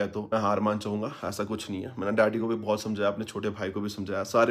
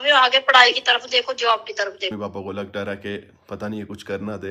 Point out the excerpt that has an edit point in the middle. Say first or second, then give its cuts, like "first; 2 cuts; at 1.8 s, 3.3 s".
second; 1 cut; at 2.1 s